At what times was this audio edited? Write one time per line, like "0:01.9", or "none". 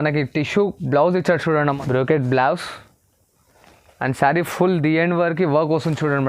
0:01.6